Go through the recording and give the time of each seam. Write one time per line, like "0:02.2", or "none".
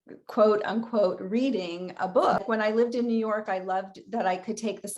0:02.4